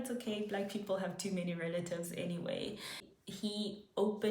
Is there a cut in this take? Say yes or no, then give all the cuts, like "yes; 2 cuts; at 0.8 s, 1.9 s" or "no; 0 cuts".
yes; 1 cut; at 3.2 s